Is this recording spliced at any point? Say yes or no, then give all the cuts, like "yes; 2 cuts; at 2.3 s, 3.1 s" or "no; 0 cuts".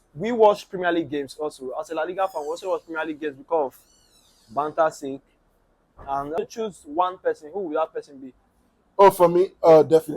yes; 1 cut; at 6.4 s